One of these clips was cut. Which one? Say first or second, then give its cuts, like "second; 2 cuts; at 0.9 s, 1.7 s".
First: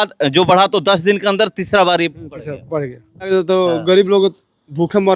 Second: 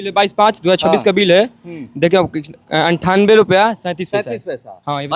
first; 1 cut; at 3.3 s